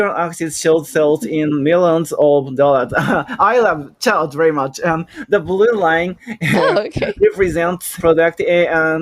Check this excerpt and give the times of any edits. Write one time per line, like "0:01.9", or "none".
0:08.0